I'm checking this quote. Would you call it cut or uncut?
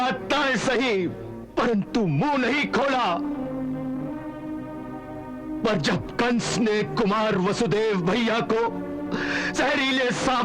uncut